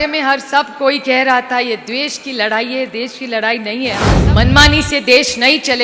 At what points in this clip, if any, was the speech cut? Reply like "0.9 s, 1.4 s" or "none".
4.1 s